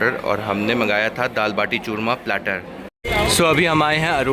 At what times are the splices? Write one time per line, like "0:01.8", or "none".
0:03.0

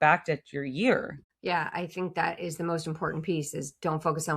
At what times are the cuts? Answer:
0:01.2

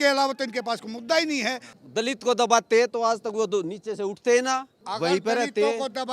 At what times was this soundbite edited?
0:01.7
0:04.8

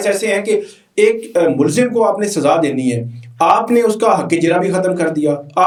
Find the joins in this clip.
none

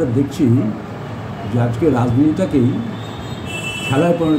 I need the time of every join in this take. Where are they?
none

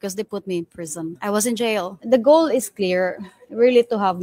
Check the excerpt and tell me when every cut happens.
0:01.2
0:01.9

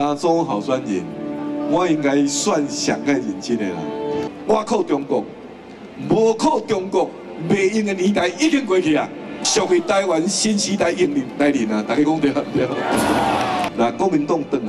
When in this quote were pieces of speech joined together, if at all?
0:04.3
0:09.5
0:13.7

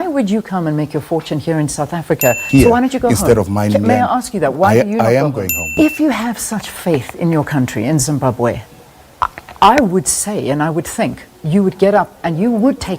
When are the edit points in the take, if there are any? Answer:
0:02.4
0:05.7

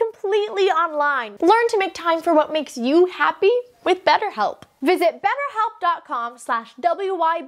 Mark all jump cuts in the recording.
0:01.2
0:04.7

